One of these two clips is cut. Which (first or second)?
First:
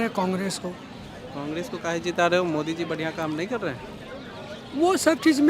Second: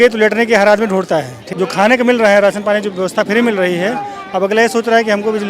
second